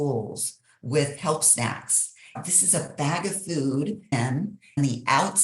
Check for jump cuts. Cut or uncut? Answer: cut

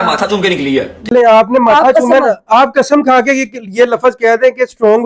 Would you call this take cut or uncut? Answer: cut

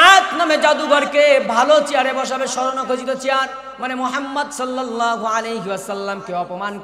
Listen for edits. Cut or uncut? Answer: uncut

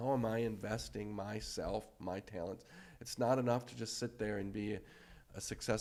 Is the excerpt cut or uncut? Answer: uncut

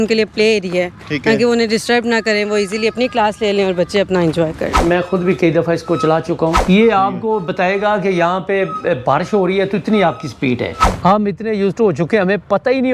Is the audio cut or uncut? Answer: cut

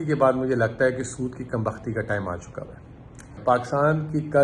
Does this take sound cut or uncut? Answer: cut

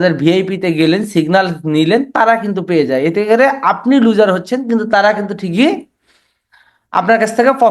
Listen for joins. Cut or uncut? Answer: uncut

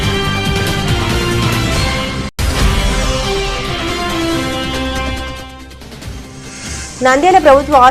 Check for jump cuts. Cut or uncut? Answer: cut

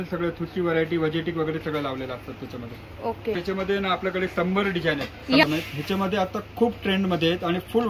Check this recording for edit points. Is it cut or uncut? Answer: uncut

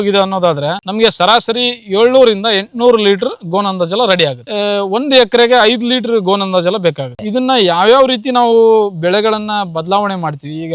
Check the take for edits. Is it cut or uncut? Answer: cut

